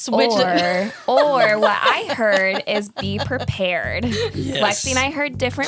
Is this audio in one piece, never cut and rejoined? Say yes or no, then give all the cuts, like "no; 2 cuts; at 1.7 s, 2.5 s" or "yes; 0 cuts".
yes; 0 cuts